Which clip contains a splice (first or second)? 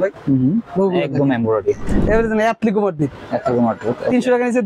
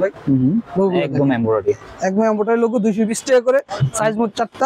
first